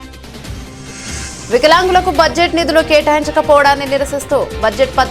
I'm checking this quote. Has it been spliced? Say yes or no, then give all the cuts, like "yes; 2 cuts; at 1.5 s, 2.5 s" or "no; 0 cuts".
yes; 1 cut; at 0.9 s